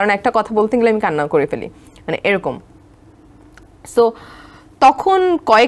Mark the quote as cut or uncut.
uncut